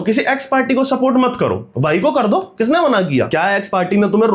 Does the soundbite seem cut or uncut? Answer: cut